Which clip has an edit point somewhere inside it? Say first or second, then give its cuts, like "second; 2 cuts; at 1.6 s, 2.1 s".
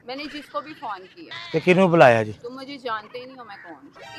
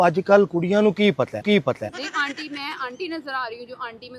second; 1 cut; at 1.9 s